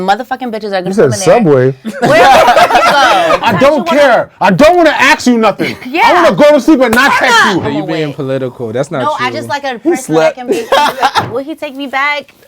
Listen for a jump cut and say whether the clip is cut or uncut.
cut